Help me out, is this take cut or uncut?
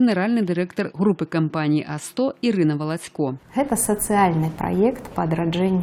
uncut